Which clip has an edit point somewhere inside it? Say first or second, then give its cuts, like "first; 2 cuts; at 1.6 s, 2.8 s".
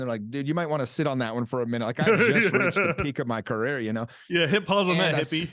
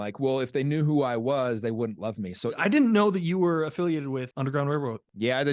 second; 2 cuts; at 2.6 s, 4.3 s